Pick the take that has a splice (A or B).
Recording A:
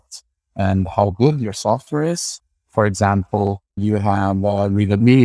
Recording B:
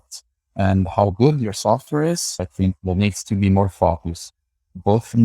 B